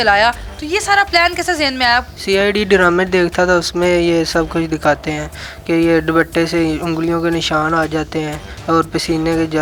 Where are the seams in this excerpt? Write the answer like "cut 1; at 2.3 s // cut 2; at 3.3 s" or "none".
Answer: none